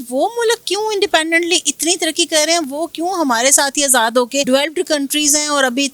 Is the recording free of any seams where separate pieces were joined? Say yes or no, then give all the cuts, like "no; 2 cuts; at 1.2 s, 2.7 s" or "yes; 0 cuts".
no; 1 cut; at 4.5 s